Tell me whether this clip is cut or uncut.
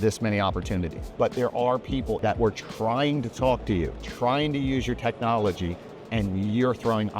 cut